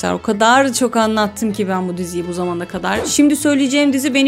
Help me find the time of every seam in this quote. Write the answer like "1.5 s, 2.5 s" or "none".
3.0 s